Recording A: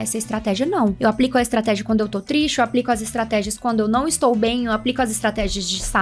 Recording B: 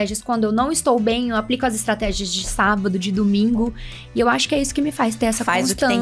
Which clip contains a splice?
A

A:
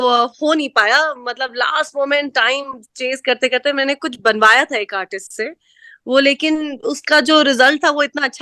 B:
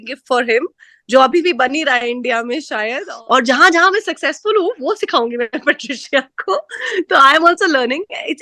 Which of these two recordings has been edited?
B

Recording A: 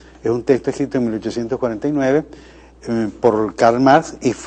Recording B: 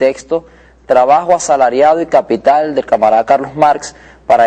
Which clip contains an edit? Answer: A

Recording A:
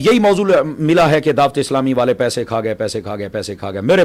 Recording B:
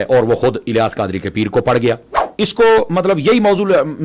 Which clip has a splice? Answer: B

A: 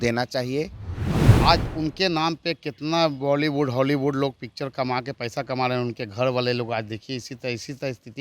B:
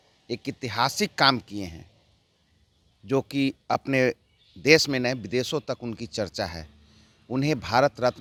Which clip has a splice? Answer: A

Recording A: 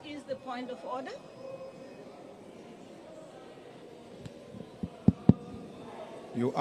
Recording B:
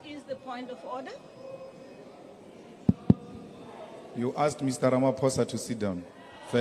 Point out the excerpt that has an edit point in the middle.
B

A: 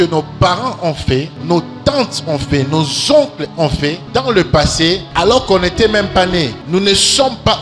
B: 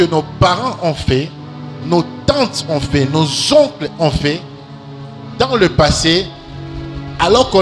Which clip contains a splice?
A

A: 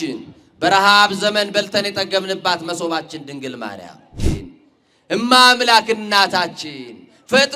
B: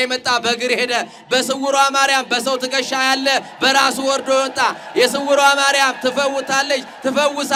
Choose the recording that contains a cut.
A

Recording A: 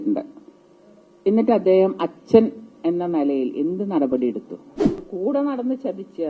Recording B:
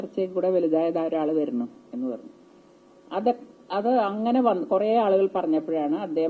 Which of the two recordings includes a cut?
A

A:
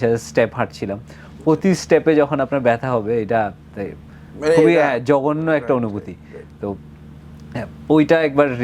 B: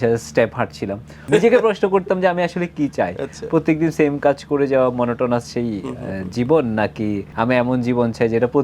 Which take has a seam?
B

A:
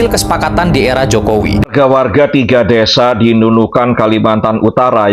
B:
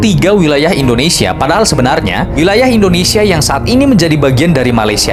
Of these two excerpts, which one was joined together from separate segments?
A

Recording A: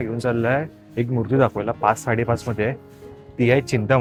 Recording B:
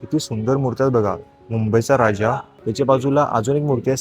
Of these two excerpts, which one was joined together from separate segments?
B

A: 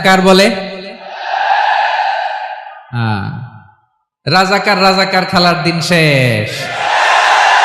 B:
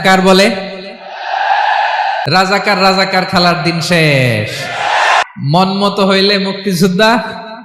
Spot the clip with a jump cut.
B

